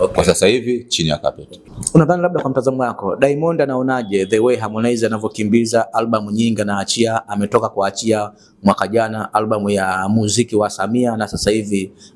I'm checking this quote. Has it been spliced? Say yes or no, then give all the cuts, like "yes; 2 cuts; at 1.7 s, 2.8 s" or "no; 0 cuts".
yes; 1 cut; at 1.7 s